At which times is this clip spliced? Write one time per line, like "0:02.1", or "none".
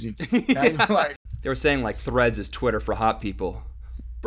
0:01.2